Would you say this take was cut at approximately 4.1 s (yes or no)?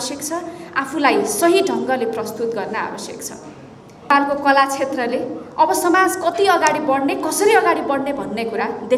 yes